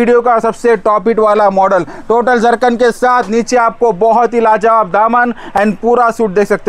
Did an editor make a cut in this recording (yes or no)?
no